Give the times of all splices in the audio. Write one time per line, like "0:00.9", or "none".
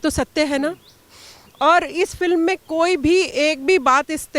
none

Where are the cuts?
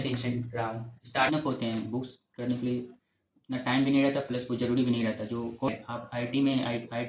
0:01.3
0:05.7

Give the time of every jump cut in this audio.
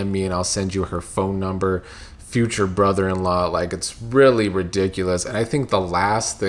none

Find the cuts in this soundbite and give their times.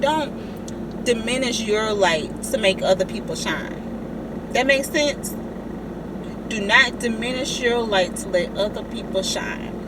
none

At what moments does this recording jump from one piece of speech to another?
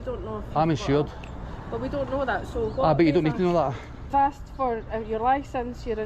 0:04.1

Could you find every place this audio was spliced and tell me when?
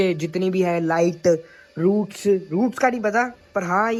none

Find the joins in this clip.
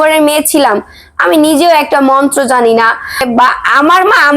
0:03.2

